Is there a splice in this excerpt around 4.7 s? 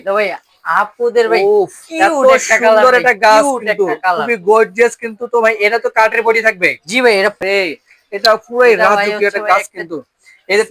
no; 1 cut; at 7.4 s

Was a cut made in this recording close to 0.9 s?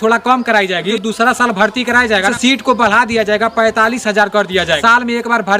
yes; 3 cuts; at 0.9 s, 2.3 s, 4.8 s

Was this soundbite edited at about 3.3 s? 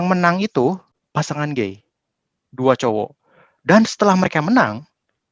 no; 1 cut; at 0.9 s

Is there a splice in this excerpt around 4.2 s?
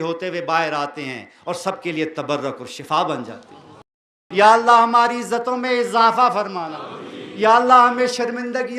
yes; 1 cut; at 4.2 s

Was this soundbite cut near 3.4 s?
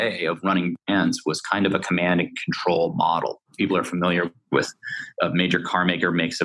yes; 2 cuts; at 3.4 s, 5.0 s

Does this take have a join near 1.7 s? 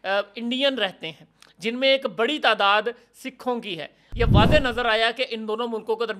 no; 1 cut; at 4.0 s

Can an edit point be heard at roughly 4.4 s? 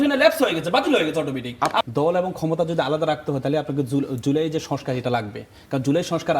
no; 1 cut; at 1.8 s

